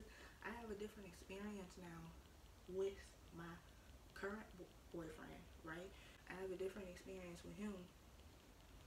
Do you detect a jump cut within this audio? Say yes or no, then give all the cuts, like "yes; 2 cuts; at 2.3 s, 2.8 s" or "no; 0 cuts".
no; 0 cuts